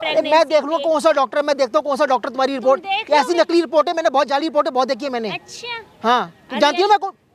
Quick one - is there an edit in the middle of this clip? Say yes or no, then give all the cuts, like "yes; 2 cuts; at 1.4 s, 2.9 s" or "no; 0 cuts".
no; 0 cuts